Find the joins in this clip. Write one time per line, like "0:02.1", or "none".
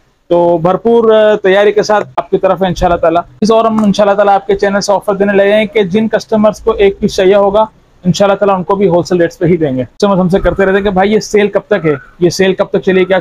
0:02.2
0:03.4
0:09.9